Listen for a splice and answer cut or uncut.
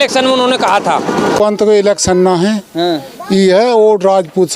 cut